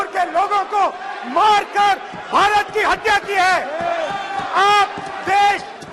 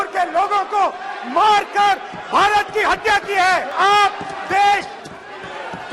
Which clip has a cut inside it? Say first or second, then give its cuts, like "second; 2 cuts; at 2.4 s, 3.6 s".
second; 1 cut; at 3.7 s